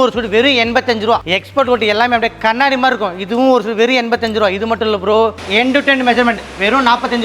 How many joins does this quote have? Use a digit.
2